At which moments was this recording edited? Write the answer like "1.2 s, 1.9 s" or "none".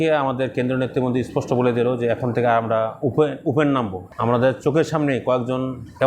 4.0 s